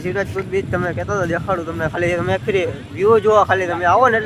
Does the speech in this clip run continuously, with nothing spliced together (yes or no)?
yes